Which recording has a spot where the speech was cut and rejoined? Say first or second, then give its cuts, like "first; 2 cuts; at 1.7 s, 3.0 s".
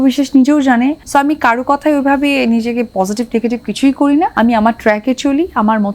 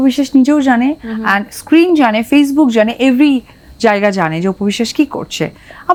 first; 2 cuts; at 1.0 s, 4.3 s